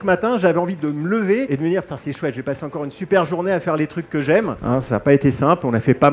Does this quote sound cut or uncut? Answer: cut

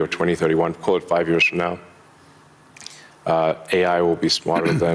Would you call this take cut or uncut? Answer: uncut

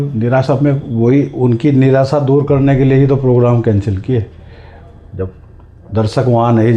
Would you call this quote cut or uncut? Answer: uncut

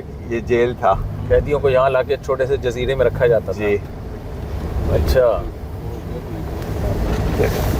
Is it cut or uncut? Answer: uncut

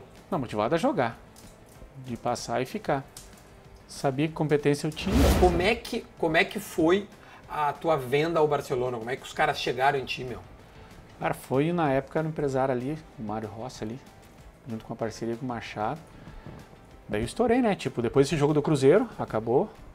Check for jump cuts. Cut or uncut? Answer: cut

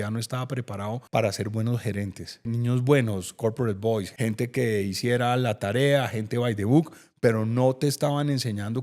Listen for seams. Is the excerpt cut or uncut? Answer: cut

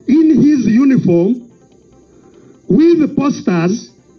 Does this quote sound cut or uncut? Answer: uncut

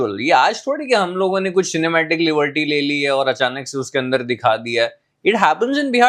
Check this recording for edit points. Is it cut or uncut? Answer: uncut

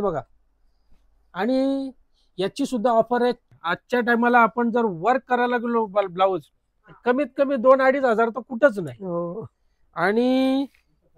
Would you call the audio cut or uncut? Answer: cut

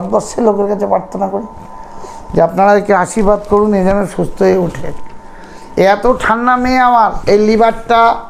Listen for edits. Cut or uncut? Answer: cut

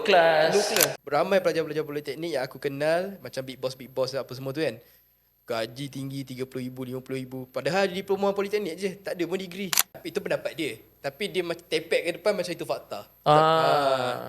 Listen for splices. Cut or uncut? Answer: cut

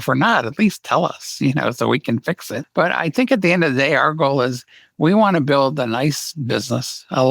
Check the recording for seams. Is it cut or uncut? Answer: cut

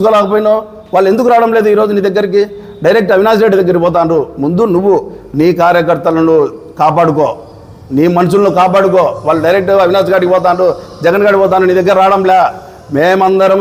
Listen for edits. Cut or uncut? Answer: uncut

